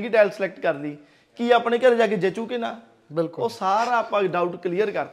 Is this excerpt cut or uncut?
uncut